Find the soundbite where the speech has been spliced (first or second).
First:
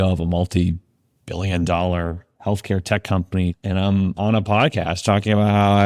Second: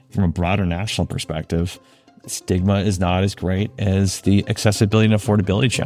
first